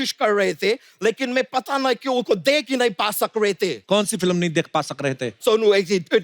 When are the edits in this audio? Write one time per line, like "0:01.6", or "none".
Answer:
0:03.8
0:05.4